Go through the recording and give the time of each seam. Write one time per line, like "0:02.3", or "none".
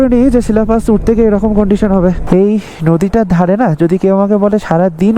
0:02.2